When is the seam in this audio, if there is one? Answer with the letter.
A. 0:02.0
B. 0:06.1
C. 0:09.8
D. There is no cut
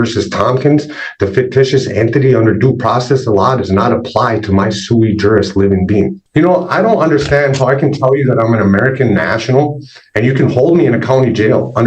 B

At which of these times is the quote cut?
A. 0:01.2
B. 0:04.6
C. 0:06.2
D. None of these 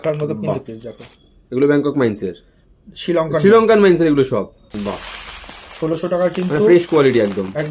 B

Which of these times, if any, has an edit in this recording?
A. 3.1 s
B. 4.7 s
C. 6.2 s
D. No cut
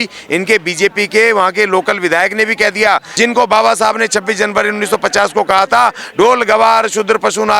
A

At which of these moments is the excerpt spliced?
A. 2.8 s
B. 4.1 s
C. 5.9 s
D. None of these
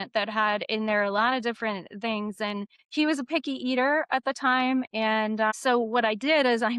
A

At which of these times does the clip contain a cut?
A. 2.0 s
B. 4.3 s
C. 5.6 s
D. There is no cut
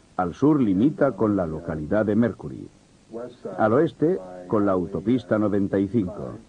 D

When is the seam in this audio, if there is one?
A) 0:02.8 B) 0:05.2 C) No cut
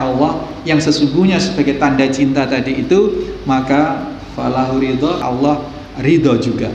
B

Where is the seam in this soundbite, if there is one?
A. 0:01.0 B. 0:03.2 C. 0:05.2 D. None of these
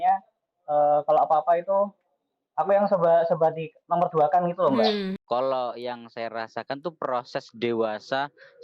C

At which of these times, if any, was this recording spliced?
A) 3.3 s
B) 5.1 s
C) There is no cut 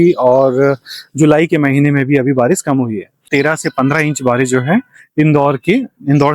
A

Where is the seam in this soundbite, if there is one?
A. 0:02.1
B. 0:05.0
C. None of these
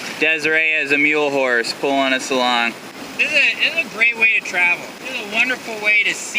B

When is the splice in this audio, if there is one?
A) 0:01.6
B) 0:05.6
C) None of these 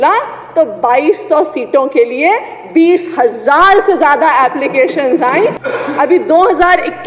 B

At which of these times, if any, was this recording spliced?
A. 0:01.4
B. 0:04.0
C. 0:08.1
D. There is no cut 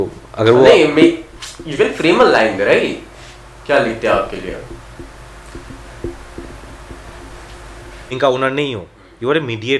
C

